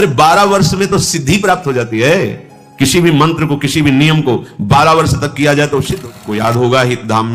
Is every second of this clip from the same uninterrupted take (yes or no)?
no